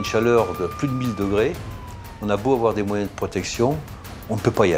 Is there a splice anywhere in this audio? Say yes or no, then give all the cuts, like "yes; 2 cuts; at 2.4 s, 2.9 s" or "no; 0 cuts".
no; 0 cuts